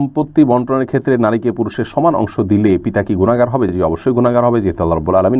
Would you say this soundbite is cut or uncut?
uncut